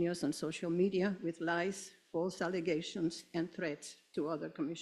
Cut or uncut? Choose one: cut